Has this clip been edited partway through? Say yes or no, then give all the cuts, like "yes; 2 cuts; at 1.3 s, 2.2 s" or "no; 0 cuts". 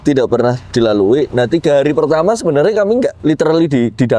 yes; 1 cut; at 3.2 s